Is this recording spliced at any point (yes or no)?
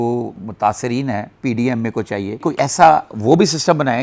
no